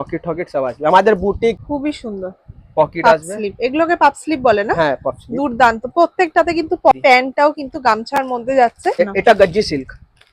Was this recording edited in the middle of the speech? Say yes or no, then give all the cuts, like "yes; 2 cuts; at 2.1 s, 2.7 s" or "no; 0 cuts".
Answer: yes; 3 cuts; at 1.6 s, 6.9 s, 9.0 s